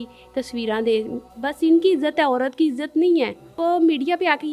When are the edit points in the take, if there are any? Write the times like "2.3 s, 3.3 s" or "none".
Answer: 1.3 s, 3.6 s